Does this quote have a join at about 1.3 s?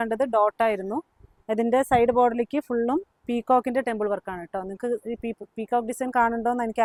no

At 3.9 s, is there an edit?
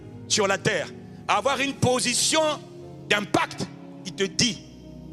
no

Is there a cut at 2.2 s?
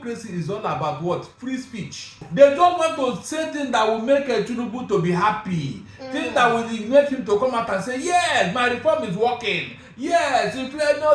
yes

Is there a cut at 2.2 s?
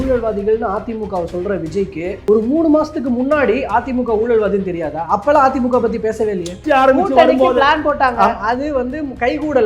yes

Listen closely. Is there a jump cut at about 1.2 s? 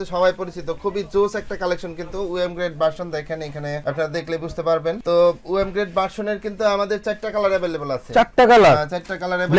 no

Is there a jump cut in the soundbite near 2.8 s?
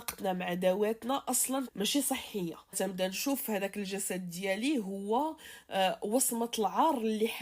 yes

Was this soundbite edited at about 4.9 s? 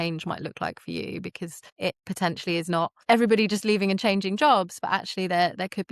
no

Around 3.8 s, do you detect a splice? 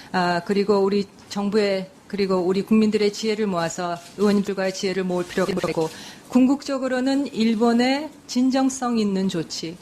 no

